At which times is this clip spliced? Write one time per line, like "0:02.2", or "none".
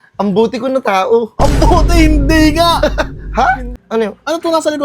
0:03.8